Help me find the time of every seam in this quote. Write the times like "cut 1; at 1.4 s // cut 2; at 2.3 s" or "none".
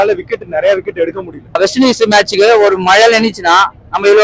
cut 1; at 1.5 s